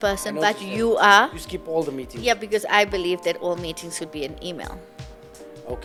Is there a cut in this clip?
no; 0 cuts

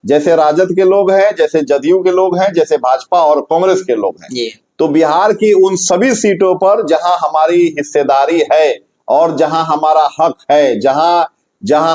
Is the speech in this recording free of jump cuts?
yes; 0 cuts

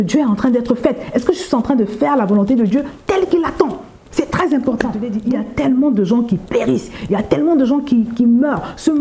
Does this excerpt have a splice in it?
yes; 1 cut; at 5.1 s

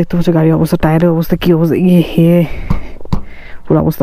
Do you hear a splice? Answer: no; 0 cuts

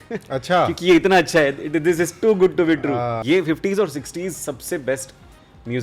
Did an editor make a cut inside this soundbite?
yes; 1 cut; at 3.2 s

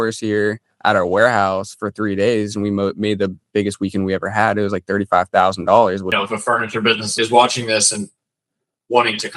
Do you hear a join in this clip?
yes; 2 cuts; at 6.1 s, 7.1 s

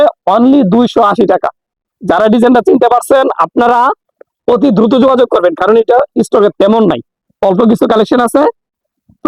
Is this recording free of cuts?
yes; 0 cuts

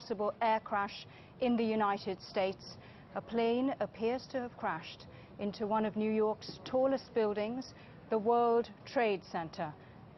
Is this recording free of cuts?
no; 1 cut; at 1.1 s

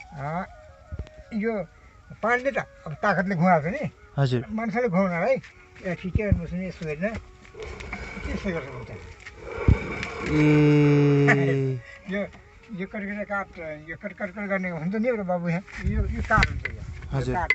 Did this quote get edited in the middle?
yes; 1 cut; at 15.7 s

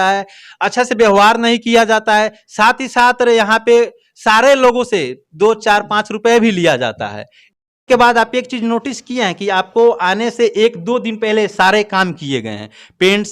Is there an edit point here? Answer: yes; 1 cut; at 7.5 s

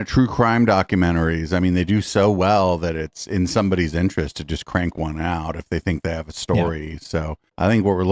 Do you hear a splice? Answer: no; 0 cuts

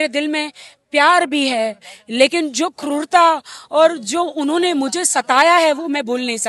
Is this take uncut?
yes; 0 cuts

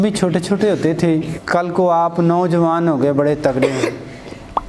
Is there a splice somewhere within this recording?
yes; 1 cut; at 1.4 s

